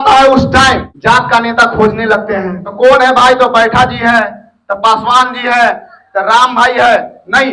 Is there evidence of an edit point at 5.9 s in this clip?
no; 2 cuts; at 0.9 s, 2.6 s

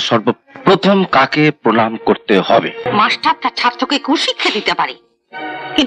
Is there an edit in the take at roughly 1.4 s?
no; 1 cut; at 2.8 s

